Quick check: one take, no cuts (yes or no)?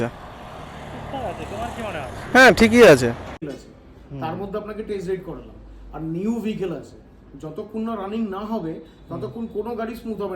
no